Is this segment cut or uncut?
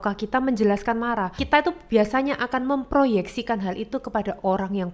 cut